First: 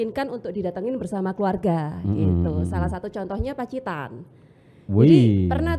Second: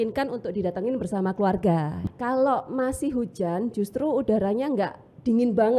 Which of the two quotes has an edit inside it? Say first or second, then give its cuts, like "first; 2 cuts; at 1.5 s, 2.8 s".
second; 1 cut; at 2.1 s